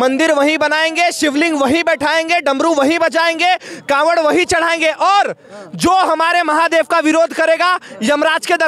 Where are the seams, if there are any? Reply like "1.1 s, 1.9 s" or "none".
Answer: none